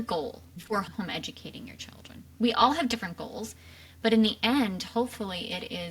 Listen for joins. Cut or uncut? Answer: cut